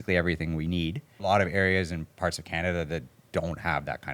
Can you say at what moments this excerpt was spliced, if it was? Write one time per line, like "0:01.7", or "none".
0:01.2